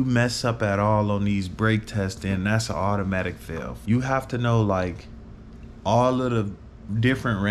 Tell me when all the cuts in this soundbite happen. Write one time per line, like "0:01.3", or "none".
0:03.7